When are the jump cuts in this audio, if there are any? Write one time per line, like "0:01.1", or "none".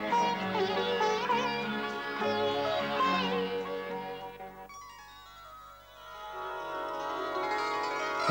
0:02.8